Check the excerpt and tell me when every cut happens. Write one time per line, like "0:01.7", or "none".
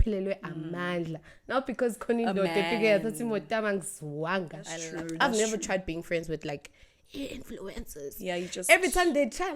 0:04.8